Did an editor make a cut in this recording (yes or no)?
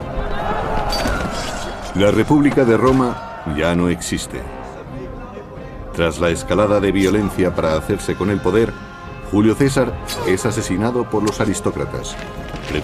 no